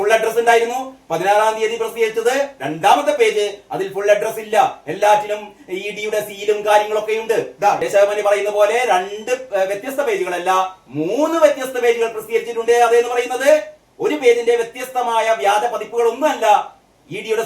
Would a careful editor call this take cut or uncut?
cut